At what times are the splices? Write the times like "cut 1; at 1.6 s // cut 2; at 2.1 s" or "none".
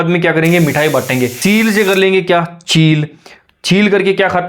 cut 1; at 1.3 s